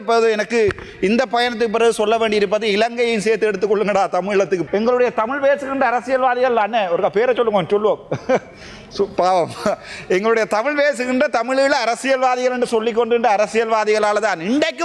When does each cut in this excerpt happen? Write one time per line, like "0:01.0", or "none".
0:04.6